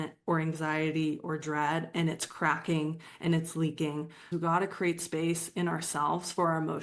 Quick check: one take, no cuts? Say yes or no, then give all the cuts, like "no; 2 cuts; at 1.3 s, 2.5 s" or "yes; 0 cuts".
no; 1 cut; at 4.3 s